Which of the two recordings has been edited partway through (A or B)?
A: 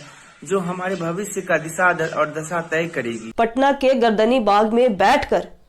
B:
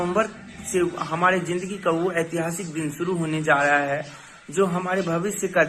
A